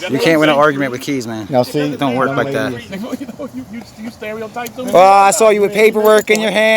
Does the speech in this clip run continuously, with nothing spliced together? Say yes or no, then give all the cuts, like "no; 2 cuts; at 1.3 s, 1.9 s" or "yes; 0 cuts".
no; 1 cut; at 2.8 s